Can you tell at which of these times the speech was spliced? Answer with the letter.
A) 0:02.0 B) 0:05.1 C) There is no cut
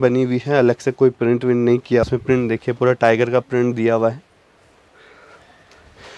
A